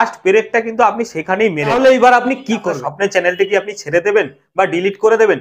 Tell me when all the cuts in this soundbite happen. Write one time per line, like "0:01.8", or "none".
0:01.7
0:02.7